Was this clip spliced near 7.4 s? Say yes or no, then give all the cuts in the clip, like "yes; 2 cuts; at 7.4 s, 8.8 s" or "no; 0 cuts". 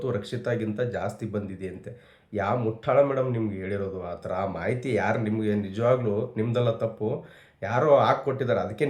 no; 0 cuts